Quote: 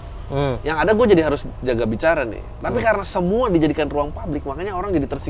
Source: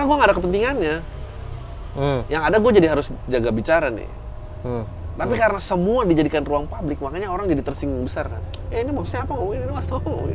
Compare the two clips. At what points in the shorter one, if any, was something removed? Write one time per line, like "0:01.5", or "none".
0:02.5